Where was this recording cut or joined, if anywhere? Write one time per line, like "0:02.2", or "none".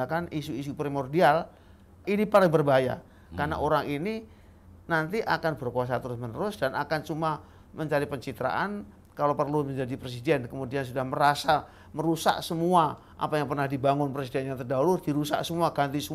0:02.0